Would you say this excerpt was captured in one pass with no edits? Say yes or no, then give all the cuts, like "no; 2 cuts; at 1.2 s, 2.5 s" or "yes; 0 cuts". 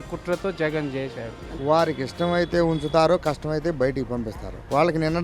no; 1 cut; at 1.5 s